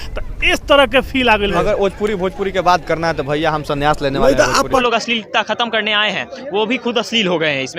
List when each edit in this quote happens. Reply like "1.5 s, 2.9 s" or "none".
1.5 s, 4.8 s

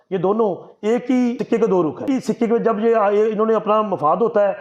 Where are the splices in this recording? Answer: 1.4 s, 2.0 s

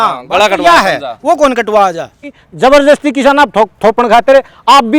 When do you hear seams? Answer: 2.4 s

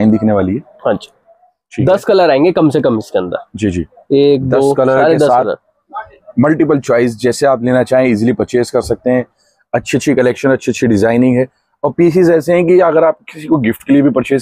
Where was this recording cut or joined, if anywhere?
none

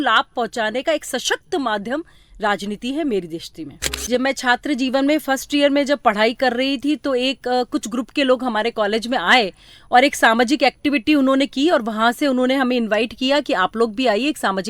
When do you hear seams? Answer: 3.9 s

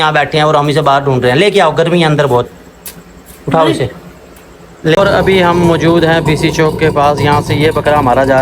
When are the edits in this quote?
5.0 s

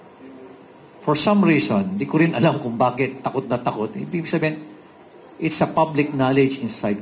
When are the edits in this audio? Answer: none

